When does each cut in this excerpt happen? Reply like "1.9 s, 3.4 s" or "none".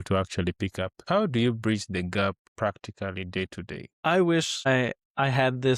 1.0 s, 2.5 s, 3.8 s, 4.9 s